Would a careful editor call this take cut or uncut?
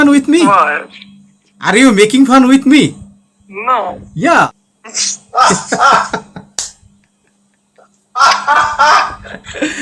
cut